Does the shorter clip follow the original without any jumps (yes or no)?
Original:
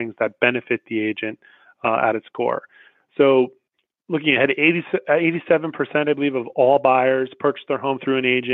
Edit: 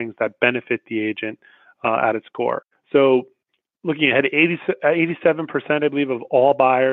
no